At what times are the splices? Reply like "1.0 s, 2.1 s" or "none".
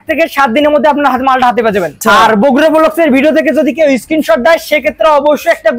1.9 s